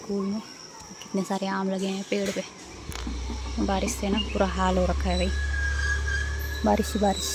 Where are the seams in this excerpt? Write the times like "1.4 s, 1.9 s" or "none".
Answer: none

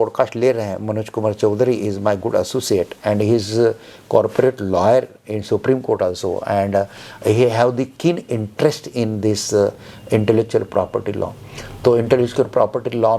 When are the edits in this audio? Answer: none

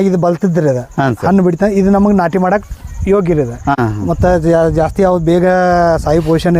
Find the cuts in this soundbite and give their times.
3.8 s

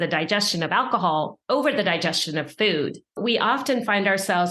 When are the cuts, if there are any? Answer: 1.4 s, 3.2 s

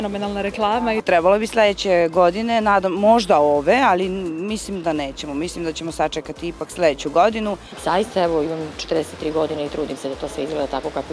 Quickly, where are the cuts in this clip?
1.0 s, 7.7 s

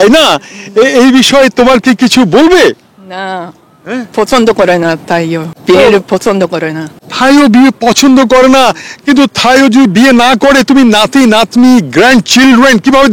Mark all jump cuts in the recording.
5.5 s

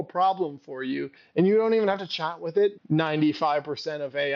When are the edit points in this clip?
2.8 s

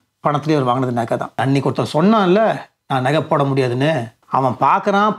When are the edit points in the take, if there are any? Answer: 1.4 s, 4.1 s

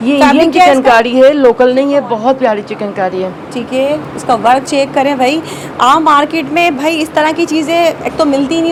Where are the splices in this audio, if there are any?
none

